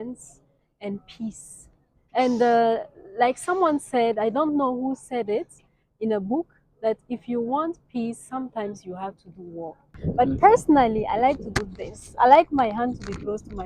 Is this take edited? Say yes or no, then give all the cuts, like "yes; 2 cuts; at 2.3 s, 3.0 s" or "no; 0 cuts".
yes; 1 cut; at 9.9 s